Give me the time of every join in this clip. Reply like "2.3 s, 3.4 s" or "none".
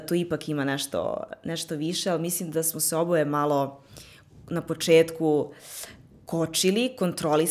none